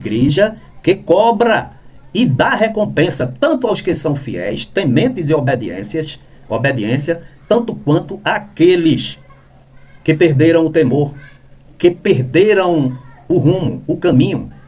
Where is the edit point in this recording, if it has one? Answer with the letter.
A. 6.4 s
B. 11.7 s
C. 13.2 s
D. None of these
D